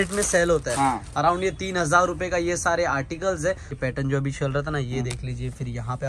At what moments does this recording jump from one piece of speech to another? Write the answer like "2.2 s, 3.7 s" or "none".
3.8 s